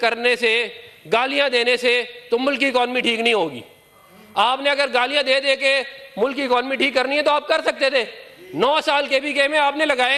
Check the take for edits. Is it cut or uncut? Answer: uncut